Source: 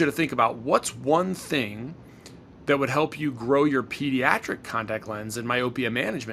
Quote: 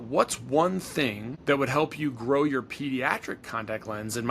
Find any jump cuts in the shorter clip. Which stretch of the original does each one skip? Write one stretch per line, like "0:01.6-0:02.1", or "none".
0:01.8-0:02.5